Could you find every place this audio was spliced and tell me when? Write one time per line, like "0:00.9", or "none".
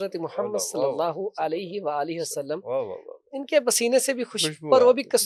none